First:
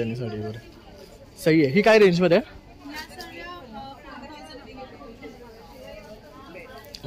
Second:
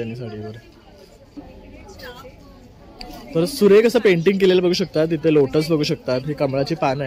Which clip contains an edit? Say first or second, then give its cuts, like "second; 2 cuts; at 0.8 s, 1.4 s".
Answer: second; 1 cut; at 1.3 s